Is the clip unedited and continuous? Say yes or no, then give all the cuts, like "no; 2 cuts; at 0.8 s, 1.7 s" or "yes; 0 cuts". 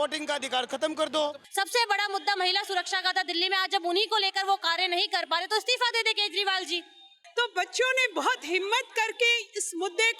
no; 2 cuts; at 1.4 s, 7.1 s